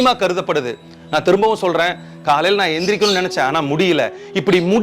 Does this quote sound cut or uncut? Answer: uncut